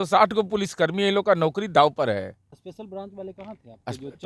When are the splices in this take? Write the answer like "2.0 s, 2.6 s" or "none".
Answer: 2.5 s